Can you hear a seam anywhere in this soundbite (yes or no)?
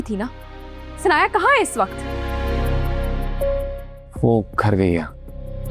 no